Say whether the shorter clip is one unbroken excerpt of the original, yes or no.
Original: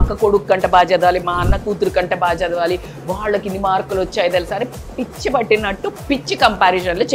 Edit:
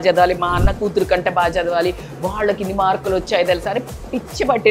yes